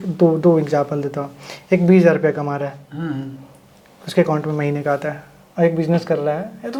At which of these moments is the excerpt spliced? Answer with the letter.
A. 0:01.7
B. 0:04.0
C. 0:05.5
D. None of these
D